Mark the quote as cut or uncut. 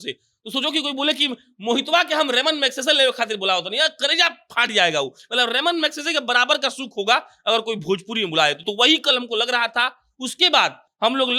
uncut